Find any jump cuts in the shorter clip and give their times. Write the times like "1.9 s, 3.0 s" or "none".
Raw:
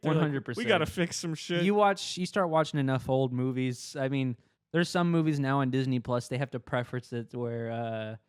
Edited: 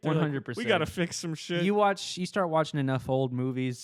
none